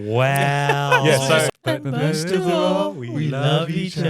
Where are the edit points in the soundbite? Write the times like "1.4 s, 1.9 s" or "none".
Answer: 1.5 s